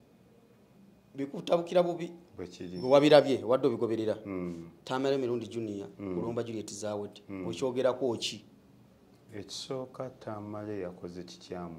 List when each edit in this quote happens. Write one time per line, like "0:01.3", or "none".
none